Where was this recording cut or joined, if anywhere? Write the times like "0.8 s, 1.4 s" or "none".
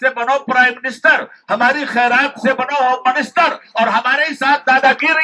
none